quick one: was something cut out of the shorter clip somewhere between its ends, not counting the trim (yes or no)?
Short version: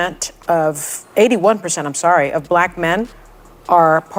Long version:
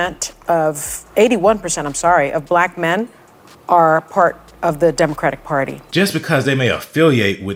no